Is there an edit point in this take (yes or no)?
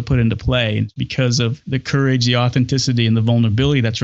yes